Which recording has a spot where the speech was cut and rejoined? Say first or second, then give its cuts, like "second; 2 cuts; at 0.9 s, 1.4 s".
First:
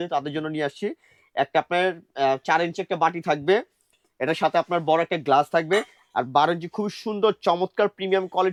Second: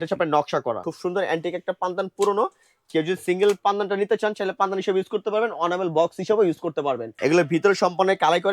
second; 2 cuts; at 0.9 s, 7.1 s